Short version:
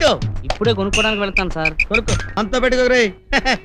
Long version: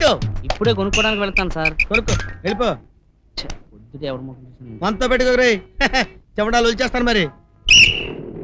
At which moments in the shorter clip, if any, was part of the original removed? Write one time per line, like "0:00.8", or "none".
0:02.3